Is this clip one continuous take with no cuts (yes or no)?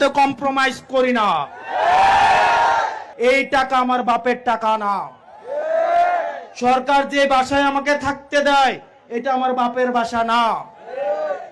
no